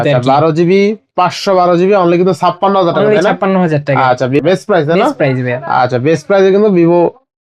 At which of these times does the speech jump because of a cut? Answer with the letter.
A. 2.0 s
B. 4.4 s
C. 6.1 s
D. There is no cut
B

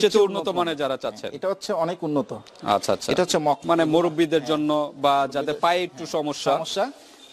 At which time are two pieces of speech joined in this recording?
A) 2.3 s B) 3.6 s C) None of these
B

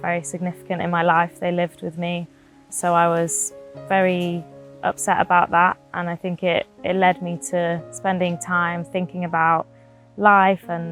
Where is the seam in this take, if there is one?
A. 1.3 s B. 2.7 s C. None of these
B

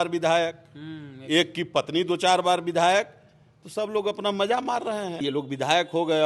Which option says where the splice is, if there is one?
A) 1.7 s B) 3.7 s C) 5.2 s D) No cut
C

